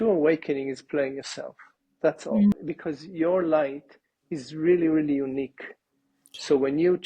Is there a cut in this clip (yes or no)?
yes